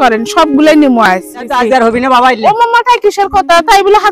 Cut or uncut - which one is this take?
cut